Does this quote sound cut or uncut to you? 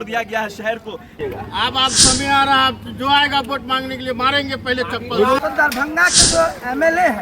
cut